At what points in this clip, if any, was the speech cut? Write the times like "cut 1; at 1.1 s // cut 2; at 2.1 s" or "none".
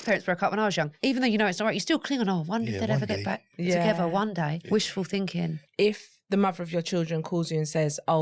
cut 1; at 0.9 s // cut 2; at 4.6 s // cut 3; at 5.6 s